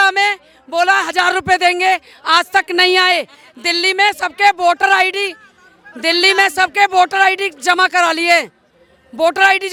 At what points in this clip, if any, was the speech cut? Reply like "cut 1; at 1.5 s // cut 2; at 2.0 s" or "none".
none